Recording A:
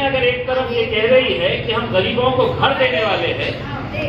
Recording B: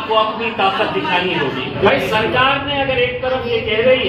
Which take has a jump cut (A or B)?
B